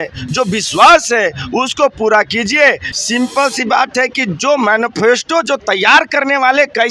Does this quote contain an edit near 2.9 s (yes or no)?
yes